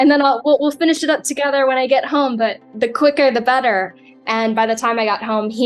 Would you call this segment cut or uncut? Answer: uncut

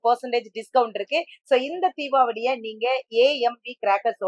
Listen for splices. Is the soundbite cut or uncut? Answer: uncut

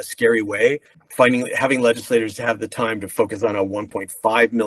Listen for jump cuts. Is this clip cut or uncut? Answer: cut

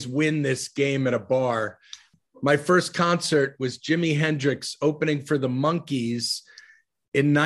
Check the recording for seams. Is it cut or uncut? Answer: cut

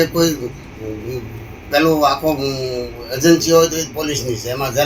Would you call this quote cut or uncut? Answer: uncut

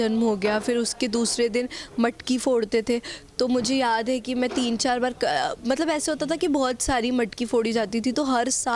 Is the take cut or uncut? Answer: uncut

